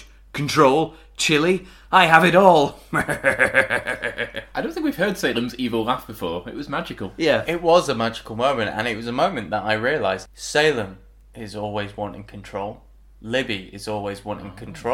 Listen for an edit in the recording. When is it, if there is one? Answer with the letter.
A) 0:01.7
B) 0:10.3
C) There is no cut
B